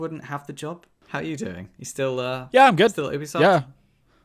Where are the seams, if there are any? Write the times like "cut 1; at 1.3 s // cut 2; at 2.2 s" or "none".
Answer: cut 1; at 0.9 s